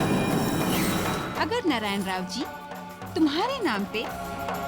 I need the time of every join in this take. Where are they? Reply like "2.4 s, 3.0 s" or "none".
1.2 s

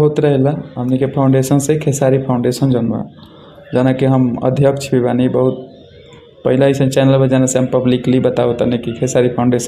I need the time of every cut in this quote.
none

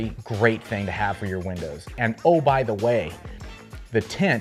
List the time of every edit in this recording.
none

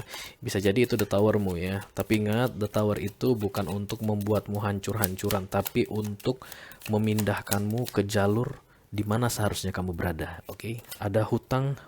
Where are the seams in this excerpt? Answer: 10.9 s

